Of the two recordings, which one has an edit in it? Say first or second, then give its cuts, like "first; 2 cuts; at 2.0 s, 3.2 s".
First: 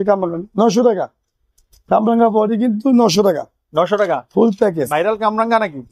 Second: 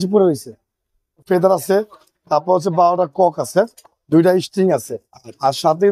second; 1 cut; at 1.2 s